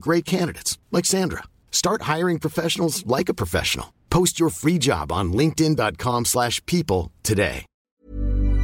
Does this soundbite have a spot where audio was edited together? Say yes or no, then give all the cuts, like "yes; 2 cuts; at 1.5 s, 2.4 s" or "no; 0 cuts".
yes; 1 cut; at 7.7 s